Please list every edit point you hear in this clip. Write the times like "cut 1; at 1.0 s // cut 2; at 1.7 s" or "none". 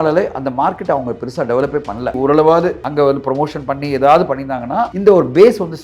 cut 1; at 2.2 s // cut 2; at 2.8 s // cut 3; at 4.9 s

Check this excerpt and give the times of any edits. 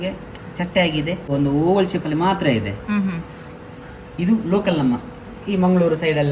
cut 1; at 1.3 s

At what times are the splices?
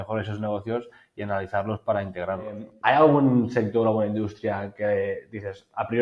cut 1; at 2.7 s

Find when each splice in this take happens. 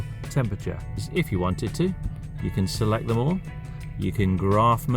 cut 1; at 1.1 s

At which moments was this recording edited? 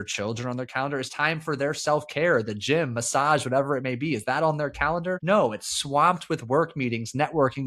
cut 1; at 5.2 s

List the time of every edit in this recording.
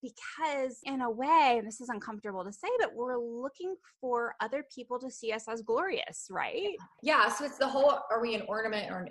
cut 1; at 0.8 s // cut 2; at 6.9 s

